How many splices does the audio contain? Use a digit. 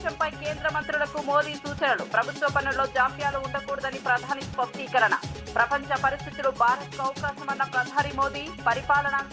0